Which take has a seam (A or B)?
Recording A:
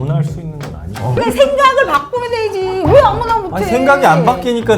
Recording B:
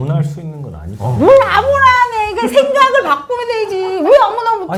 A